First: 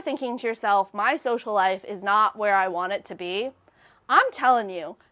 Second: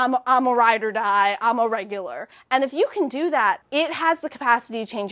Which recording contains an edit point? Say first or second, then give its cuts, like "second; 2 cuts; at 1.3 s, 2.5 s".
second; 2 cuts; at 2.3 s, 3.6 s